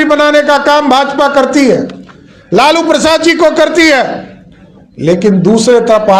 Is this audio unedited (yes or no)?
yes